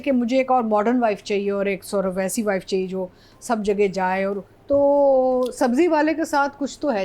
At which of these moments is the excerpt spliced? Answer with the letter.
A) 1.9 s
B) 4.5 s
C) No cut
B